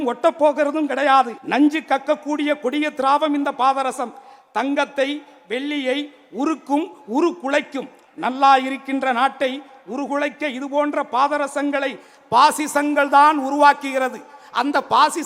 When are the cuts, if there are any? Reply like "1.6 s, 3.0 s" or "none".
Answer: 1.4 s